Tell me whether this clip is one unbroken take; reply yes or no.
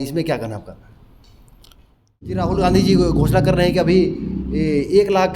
no